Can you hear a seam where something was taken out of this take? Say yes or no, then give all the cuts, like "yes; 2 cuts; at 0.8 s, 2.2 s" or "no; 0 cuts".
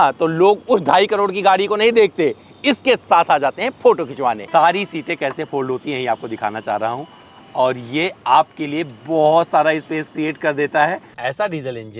yes; 2 cuts; at 4.4 s, 11.1 s